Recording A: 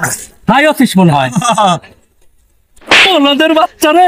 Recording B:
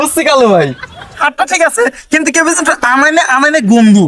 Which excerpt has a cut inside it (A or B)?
B